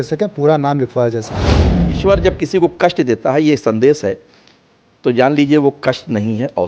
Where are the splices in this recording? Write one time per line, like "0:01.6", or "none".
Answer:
0:01.7